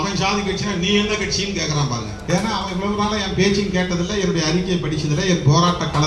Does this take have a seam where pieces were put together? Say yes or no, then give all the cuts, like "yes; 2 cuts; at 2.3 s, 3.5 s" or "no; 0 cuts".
yes; 1 cut; at 2.2 s